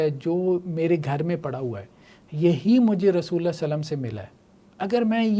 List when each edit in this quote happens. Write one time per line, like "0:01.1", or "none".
none